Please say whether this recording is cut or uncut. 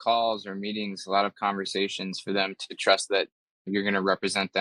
cut